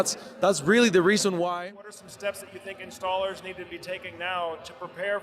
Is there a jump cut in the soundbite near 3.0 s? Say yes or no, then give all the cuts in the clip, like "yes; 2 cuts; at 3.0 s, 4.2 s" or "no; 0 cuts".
no; 1 cut; at 1.5 s